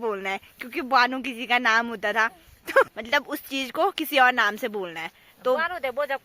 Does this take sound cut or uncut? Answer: cut